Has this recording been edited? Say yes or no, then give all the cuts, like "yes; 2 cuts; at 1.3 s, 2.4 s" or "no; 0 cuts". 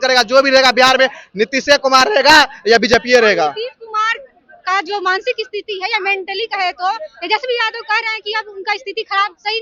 no; 0 cuts